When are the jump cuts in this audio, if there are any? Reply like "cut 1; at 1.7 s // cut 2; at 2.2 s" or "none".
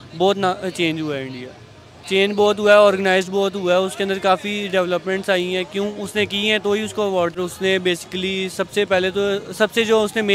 cut 1; at 7.3 s